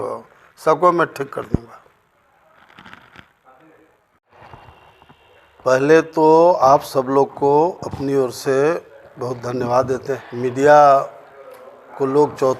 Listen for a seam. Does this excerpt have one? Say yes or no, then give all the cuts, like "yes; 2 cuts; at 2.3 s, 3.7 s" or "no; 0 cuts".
yes; 2 cuts; at 4.3 s, 10.2 s